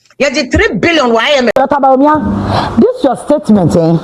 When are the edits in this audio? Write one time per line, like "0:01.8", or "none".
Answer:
0:01.5